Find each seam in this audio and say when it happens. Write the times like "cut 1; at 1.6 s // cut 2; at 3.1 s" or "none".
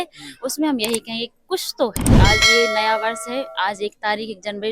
cut 1; at 2.2 s